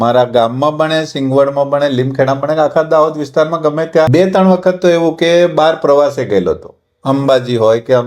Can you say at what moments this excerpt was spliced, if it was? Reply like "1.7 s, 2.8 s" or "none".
4.1 s